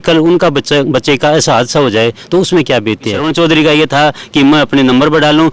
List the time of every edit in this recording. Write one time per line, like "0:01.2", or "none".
0:03.2